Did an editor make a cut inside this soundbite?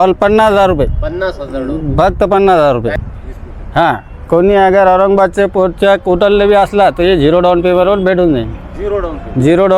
yes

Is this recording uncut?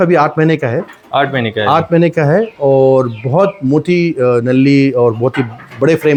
yes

